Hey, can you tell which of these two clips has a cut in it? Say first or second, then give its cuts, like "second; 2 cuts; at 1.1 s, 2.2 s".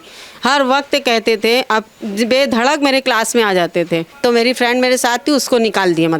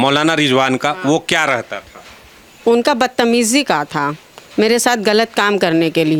first; 1 cut; at 4.1 s